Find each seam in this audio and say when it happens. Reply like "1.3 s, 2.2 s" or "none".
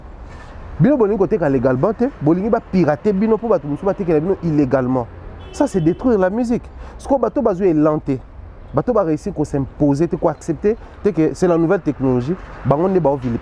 none